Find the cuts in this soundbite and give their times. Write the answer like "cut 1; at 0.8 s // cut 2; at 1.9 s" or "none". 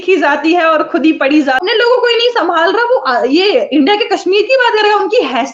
cut 1; at 1.6 s